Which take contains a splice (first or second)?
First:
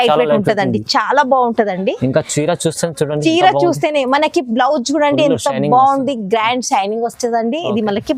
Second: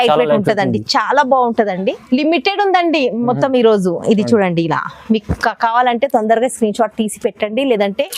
second